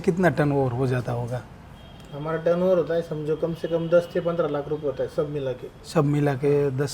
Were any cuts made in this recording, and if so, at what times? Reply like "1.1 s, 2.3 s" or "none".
none